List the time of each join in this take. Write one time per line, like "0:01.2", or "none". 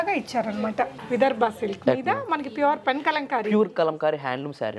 0:01.0